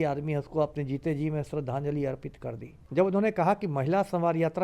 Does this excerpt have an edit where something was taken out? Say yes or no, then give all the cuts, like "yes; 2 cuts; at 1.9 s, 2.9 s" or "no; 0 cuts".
yes; 1 cut; at 2.7 s